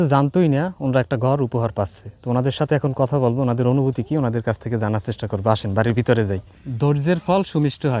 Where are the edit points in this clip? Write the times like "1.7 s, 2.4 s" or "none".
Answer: 6.6 s